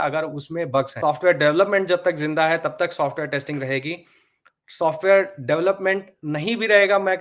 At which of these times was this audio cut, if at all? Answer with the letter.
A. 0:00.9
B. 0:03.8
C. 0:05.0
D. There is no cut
A